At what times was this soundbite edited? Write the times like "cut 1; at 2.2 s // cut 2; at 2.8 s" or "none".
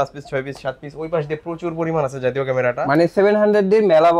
none